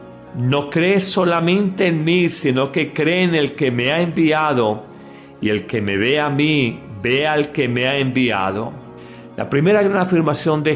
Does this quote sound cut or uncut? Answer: cut